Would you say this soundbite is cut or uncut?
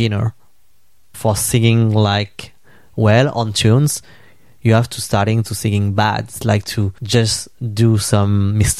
cut